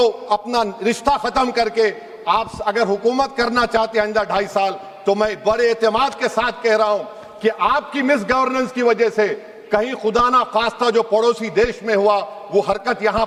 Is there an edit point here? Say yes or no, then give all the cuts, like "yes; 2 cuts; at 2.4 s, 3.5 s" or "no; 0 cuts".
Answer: no; 0 cuts